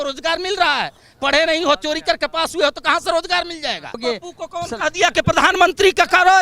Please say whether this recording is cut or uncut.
cut